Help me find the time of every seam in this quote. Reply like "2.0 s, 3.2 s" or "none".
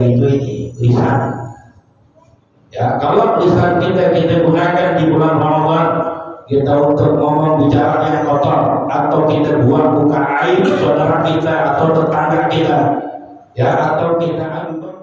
none